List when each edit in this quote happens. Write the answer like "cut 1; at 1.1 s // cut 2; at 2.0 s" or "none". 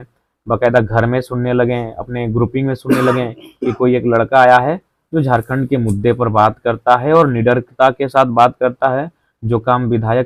none